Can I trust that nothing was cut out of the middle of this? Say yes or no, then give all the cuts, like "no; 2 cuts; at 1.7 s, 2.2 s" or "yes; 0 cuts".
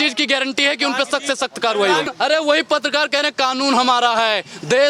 no; 1 cut; at 2.1 s